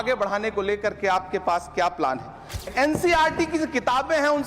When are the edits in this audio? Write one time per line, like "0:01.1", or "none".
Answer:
0:02.7